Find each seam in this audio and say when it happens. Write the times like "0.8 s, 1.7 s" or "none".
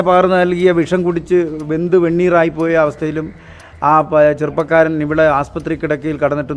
none